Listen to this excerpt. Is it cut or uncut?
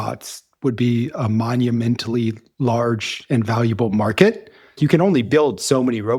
cut